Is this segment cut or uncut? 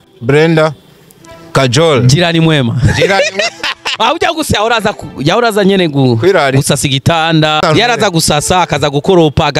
cut